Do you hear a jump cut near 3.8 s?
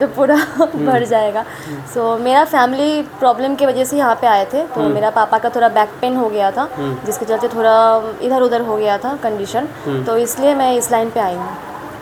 no; 0 cuts

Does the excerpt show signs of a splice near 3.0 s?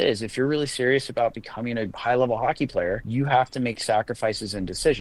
yes; 2 cuts; at 1.9 s, 3.0 s

